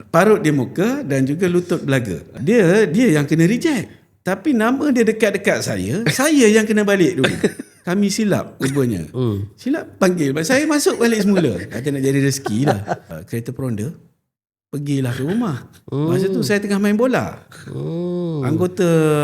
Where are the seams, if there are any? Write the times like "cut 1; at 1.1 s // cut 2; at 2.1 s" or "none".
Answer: cut 1; at 2.3 s // cut 2; at 7.7 s // cut 3; at 13.0 s